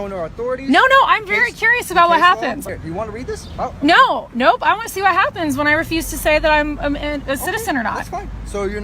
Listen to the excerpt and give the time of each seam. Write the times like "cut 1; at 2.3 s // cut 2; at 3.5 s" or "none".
cut 1; at 2.6 s